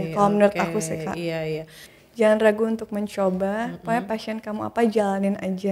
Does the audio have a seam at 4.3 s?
no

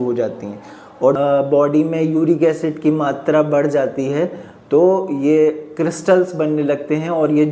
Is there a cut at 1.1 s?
yes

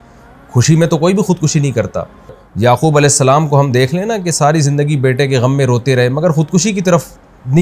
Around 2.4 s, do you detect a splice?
yes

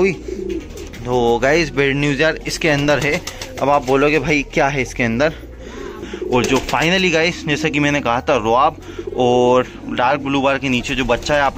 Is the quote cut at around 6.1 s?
yes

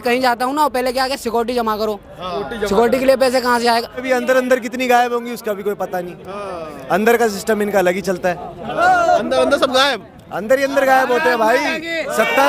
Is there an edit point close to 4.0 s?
yes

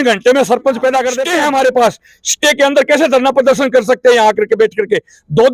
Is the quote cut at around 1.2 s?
yes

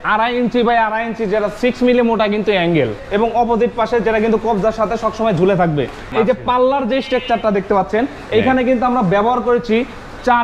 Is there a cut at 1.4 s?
no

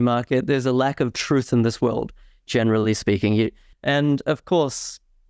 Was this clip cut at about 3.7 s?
yes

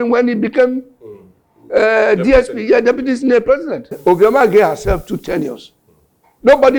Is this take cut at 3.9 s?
yes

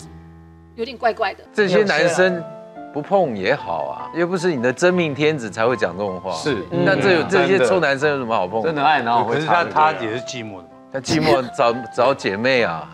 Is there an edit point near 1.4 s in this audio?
yes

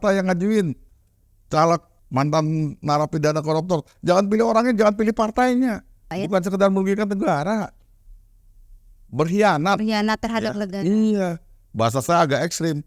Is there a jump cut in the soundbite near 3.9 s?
no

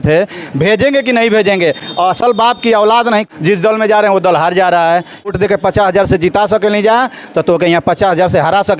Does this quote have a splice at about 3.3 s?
yes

